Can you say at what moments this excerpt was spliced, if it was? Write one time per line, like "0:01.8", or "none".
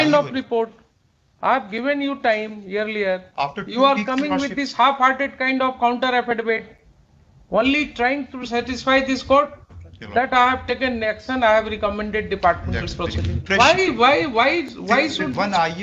0:13.4